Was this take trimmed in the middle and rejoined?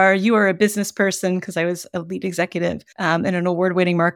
yes; 1 cut; at 2.9 s

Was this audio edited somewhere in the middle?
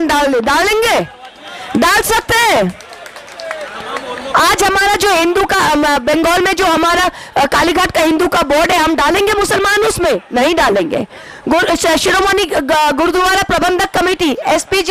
no; 0 cuts

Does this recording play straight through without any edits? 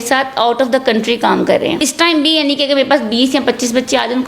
no; 1 cut; at 1.9 s

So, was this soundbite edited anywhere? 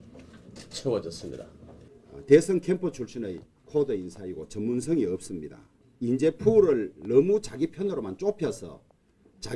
yes; 1 cut; at 6.7 s

